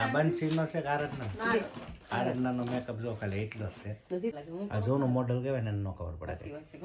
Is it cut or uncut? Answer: cut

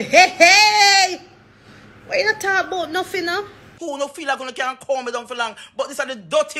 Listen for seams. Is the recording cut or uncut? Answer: cut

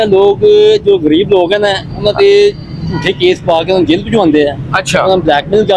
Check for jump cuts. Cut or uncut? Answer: uncut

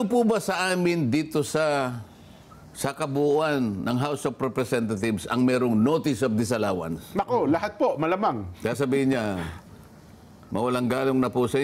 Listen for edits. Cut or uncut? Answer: uncut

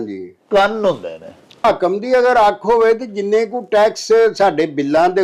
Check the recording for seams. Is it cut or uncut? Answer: cut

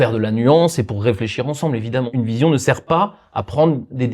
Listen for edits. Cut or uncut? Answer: cut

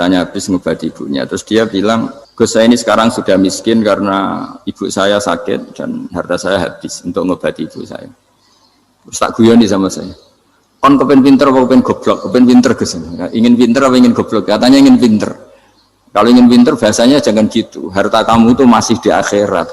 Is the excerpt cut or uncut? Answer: cut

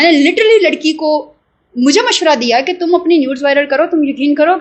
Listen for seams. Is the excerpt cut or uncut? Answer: uncut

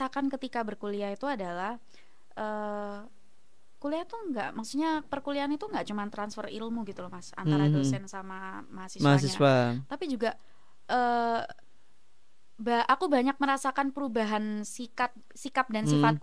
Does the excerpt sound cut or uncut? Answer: uncut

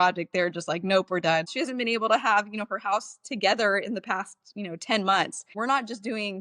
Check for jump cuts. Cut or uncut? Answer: cut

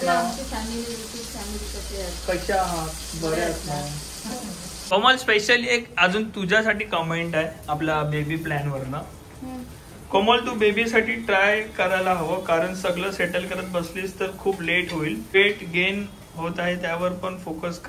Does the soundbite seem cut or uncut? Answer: cut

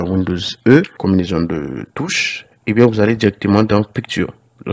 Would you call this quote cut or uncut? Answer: cut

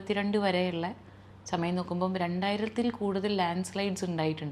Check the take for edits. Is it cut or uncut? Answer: uncut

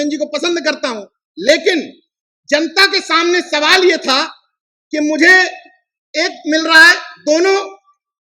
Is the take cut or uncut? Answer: uncut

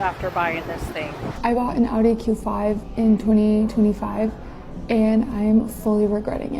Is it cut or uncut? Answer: cut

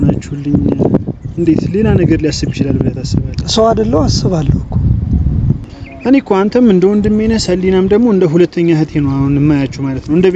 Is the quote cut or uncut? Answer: uncut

